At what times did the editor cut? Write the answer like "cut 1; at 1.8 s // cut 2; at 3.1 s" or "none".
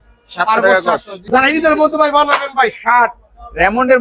cut 1; at 1.1 s